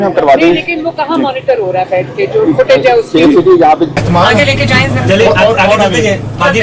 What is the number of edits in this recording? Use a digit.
1